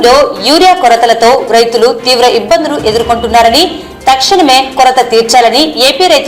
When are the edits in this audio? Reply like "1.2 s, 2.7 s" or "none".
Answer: none